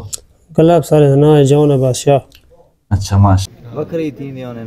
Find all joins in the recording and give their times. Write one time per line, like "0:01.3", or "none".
0:03.5